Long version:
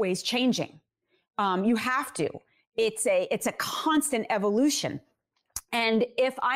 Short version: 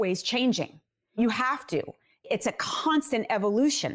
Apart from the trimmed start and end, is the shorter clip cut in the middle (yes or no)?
yes